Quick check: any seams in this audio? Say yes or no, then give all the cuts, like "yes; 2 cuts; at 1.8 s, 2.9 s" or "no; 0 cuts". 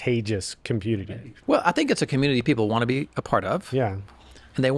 yes; 1 cut; at 1.0 s